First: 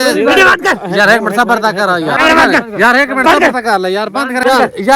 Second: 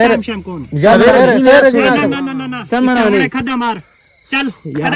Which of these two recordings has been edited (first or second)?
first